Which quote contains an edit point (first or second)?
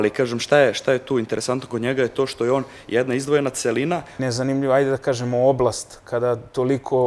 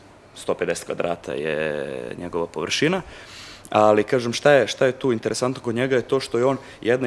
first